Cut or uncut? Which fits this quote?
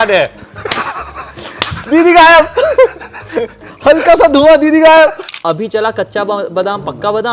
cut